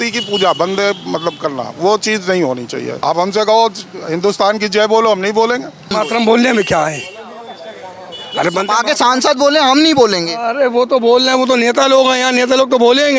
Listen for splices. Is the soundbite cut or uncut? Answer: cut